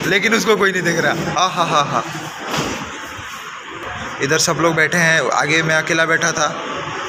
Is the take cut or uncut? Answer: uncut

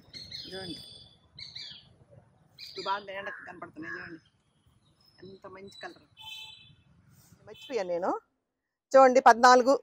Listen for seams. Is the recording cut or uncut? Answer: cut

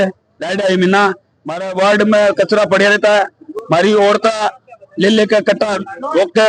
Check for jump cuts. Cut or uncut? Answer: uncut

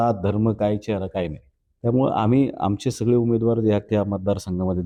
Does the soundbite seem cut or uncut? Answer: uncut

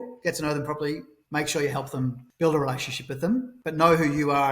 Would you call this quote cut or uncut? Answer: cut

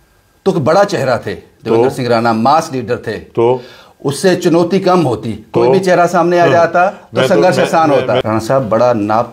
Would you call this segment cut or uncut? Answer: cut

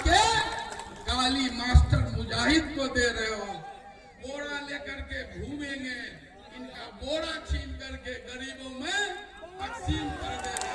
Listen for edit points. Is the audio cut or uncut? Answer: cut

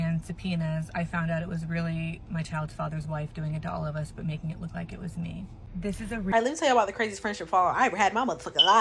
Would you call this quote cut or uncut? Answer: cut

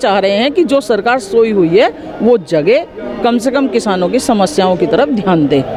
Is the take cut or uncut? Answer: uncut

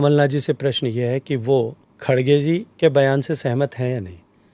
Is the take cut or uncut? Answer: cut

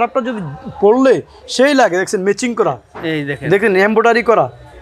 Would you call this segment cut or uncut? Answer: uncut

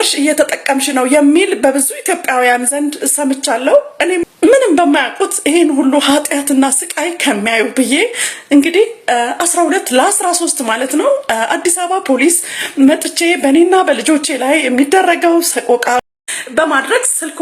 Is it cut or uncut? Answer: cut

